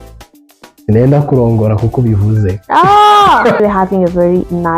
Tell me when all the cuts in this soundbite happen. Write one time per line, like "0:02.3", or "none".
0:03.6